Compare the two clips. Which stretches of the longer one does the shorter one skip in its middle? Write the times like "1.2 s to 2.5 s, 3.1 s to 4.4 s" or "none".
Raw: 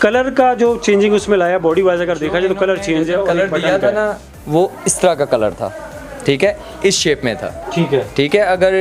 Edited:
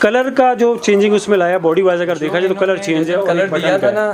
none